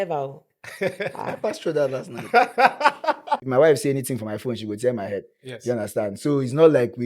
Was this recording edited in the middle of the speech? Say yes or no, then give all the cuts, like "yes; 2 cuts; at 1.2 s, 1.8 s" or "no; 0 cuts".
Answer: yes; 1 cut; at 3.4 s